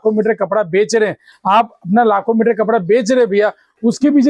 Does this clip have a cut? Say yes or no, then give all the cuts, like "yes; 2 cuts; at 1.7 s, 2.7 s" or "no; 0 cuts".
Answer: no; 0 cuts